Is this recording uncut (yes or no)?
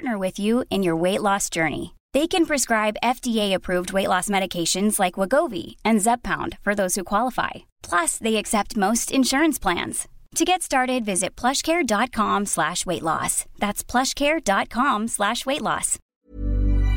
yes